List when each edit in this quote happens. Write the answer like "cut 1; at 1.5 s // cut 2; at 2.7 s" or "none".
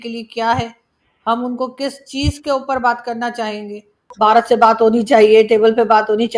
cut 1; at 4.0 s